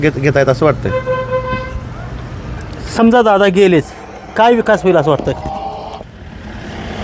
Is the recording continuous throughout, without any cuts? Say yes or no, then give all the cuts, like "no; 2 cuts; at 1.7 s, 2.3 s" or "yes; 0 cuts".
yes; 0 cuts